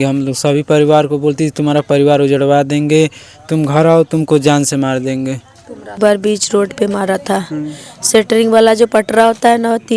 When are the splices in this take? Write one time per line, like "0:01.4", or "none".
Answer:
0:06.0